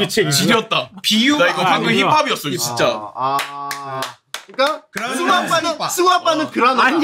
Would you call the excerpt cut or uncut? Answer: uncut